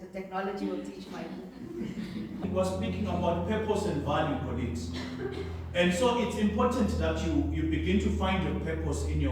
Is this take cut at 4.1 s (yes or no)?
no